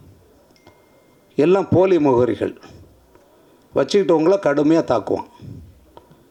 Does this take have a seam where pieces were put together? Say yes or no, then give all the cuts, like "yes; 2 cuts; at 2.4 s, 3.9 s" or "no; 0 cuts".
no; 0 cuts